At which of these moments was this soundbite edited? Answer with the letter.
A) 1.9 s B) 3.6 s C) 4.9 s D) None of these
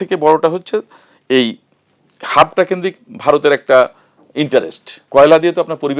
C